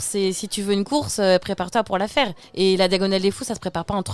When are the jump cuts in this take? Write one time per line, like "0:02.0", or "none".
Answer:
0:02.4